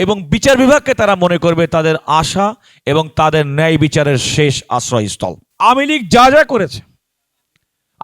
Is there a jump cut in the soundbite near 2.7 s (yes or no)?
no